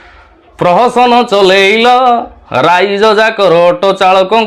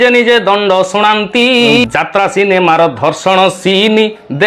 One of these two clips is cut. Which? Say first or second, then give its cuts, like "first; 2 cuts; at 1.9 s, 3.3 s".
second; 1 cut; at 1.8 s